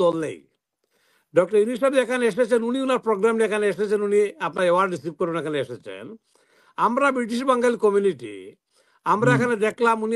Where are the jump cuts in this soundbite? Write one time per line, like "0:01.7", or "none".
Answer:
none